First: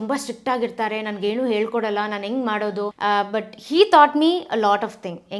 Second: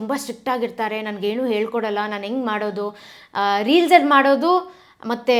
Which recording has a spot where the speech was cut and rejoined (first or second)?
first